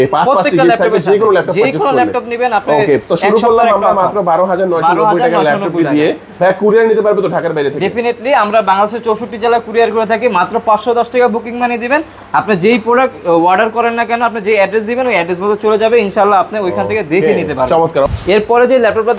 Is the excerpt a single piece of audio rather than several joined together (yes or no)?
yes